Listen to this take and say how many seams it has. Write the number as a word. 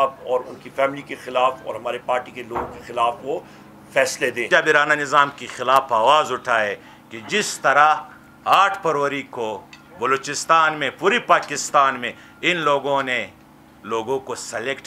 one